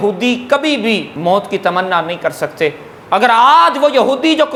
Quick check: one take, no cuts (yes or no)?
yes